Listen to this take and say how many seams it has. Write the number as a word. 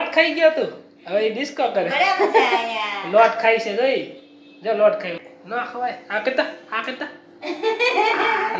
one